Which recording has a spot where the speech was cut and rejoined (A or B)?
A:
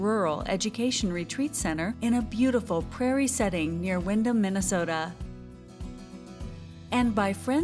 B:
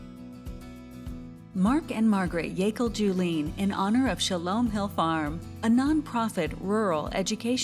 B